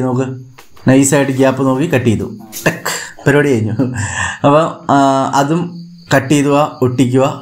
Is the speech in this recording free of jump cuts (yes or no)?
yes